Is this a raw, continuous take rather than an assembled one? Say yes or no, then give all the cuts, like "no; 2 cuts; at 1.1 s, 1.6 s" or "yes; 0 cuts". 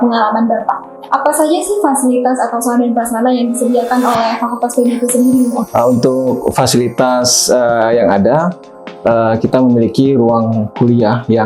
no; 2 cuts; at 1.0 s, 5.7 s